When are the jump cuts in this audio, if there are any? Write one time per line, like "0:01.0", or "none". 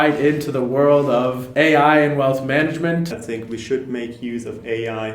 0:01.4
0:03.2